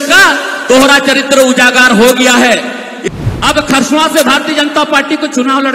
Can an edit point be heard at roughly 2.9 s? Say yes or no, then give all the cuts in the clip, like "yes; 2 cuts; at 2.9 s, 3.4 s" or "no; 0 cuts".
yes; 1 cut; at 2.9 s